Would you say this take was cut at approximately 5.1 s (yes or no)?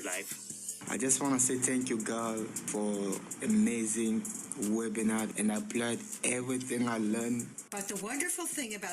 no